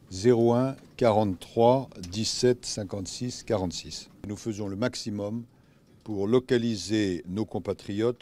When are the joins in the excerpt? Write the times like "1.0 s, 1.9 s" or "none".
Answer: 3.4 s